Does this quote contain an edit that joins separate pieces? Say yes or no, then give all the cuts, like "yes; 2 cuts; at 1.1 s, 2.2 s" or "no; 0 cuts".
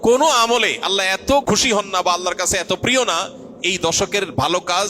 yes; 1 cut; at 1.4 s